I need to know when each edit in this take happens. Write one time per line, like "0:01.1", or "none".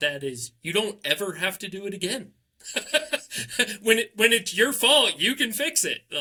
none